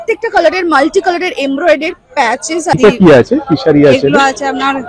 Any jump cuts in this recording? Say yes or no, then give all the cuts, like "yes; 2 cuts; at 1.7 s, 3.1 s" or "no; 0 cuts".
yes; 1 cut; at 2.7 s